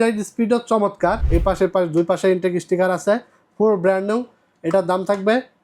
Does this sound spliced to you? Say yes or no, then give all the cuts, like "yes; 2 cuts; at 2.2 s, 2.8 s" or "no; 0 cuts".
yes; 1 cut; at 1.2 s